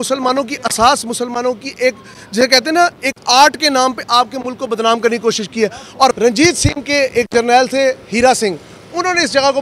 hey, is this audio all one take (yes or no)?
no